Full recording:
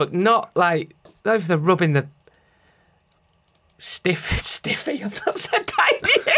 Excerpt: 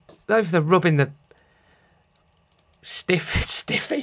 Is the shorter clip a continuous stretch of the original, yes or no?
yes